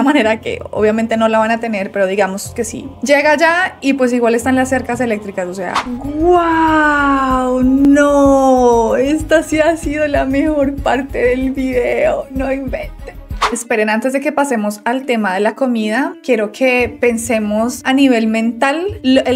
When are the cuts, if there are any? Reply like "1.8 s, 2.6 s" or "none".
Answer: 5.9 s, 13.4 s